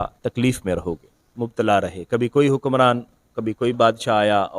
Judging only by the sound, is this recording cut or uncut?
cut